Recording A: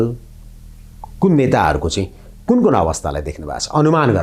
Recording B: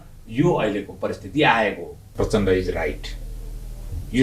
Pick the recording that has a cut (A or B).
B